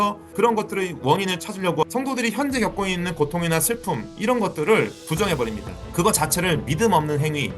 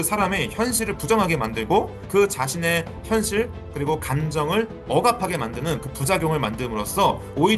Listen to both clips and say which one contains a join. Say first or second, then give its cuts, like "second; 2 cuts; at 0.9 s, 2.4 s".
first; 2 cuts; at 1.8 s, 5.0 s